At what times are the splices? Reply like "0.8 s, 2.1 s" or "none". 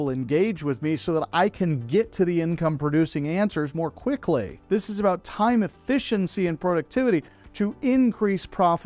4.5 s